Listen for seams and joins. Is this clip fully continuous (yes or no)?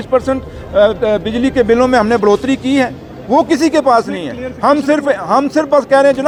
yes